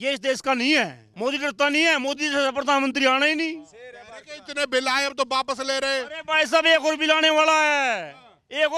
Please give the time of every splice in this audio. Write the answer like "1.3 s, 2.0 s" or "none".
1.0 s